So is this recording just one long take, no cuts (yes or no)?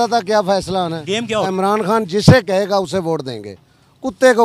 no